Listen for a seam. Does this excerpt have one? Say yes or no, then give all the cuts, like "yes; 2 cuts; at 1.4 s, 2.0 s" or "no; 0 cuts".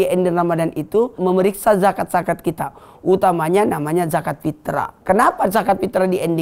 yes; 2 cuts; at 1.2 s, 4.9 s